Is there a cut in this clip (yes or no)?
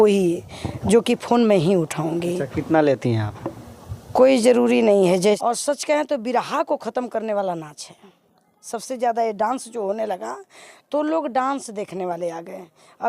yes